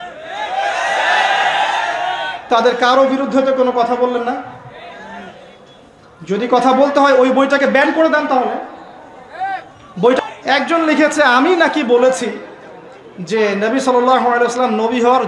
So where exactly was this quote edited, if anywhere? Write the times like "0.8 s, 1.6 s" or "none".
10.2 s